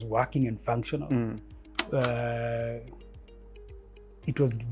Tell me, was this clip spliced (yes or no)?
no